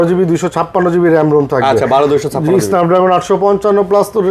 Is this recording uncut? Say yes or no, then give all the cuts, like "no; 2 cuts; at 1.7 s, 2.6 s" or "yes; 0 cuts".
yes; 0 cuts